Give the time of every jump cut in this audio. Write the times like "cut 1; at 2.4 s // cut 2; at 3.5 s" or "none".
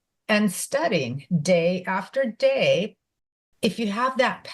cut 1; at 3.4 s